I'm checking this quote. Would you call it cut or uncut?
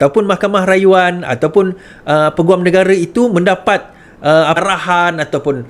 cut